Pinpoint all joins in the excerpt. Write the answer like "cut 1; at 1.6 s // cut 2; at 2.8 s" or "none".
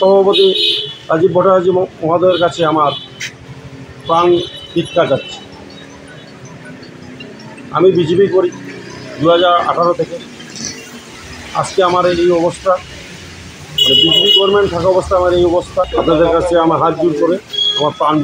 cut 1; at 15.9 s